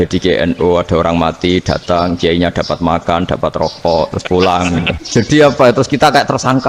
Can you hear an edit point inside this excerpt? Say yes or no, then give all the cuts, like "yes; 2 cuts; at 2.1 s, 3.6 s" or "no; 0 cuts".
yes; 1 cut; at 5.0 s